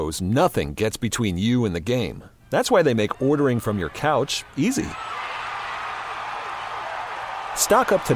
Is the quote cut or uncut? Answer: uncut